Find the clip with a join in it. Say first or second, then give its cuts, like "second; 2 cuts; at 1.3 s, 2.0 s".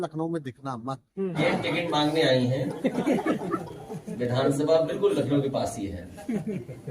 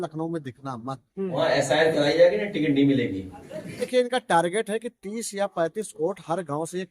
second; 2 cuts; at 1.4 s, 3.9 s